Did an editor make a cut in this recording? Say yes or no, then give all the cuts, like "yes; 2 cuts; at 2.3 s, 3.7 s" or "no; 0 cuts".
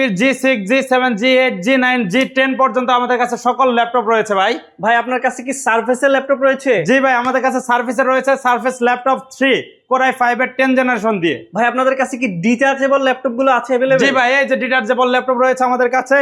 no; 0 cuts